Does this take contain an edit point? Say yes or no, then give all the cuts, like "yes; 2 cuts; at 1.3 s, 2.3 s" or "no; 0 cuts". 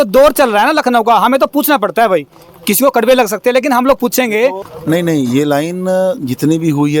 yes; 1 cut; at 4.7 s